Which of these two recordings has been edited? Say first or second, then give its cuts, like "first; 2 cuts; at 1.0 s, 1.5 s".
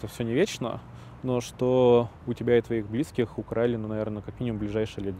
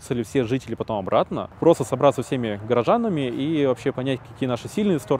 second; 1 cut; at 1.4 s